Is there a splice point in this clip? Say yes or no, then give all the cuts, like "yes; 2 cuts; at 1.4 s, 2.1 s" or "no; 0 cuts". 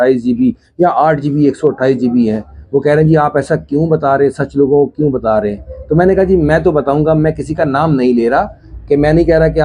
no; 0 cuts